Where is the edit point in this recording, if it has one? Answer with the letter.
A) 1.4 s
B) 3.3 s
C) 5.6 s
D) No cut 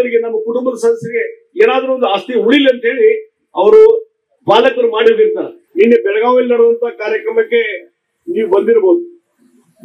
C